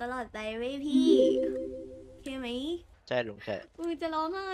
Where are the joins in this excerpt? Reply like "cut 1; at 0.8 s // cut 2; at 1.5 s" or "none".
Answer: cut 1; at 2.9 s